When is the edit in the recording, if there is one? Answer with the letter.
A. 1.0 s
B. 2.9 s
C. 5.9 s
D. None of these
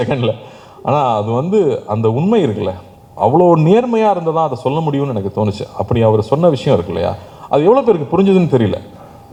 D